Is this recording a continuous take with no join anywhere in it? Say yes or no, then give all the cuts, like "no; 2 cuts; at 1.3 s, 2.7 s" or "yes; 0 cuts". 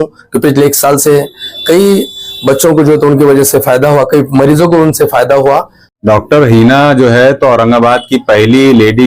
no; 1 cut; at 5.8 s